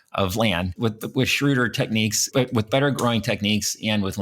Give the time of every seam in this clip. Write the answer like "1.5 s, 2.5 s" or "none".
2.3 s

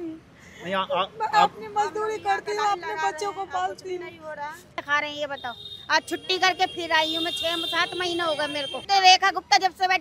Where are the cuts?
4.8 s, 8.8 s

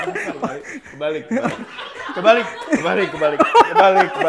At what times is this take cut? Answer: none

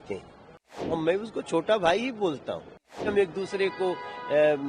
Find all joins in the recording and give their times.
1.0 s, 3.0 s

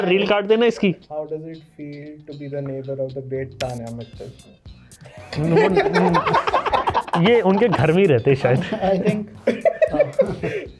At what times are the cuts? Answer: 1.0 s

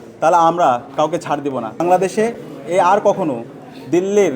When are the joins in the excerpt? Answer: 1.8 s

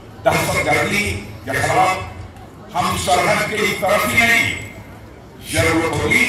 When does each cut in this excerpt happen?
none

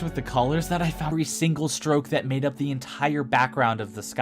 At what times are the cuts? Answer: 1.1 s

